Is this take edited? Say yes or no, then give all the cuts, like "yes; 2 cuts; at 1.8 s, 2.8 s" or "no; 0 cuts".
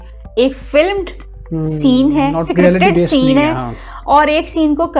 no; 0 cuts